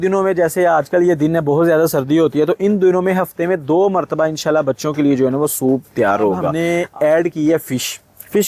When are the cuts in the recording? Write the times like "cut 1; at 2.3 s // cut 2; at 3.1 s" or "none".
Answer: cut 1; at 6.5 s

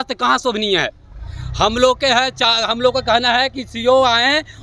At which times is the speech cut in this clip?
none

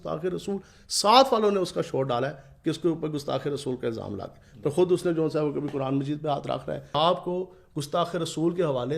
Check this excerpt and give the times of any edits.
cut 1; at 6.9 s

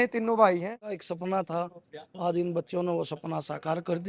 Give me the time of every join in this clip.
cut 1; at 1.0 s

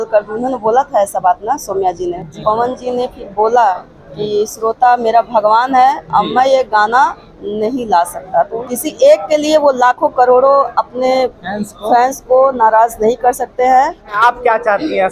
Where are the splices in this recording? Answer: cut 1; at 2.3 s // cut 2; at 8.6 s // cut 3; at 14.1 s

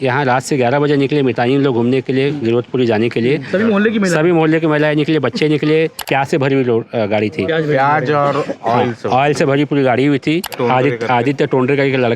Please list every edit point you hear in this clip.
cut 1; at 6.0 s // cut 2; at 10.5 s

